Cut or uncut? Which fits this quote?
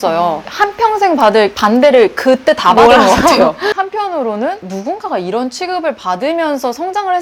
cut